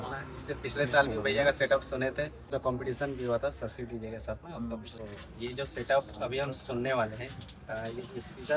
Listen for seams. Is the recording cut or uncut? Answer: cut